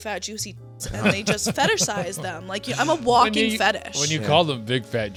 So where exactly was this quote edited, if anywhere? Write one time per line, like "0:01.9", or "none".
none